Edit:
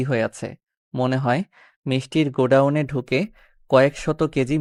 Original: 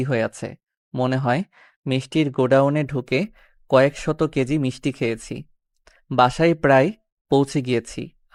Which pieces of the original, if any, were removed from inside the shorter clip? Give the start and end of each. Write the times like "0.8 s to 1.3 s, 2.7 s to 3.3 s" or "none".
none